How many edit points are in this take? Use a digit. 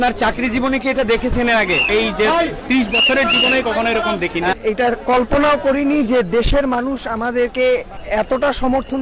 3